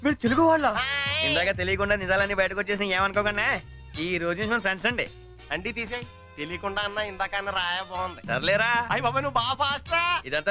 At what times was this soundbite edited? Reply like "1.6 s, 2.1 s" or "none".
none